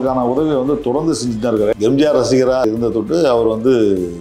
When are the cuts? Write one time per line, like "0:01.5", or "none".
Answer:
0:01.7
0:02.6